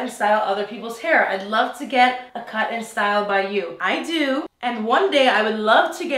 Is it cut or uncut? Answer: uncut